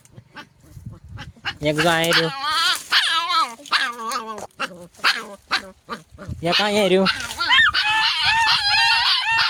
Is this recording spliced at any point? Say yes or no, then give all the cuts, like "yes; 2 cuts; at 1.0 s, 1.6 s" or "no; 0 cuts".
no; 0 cuts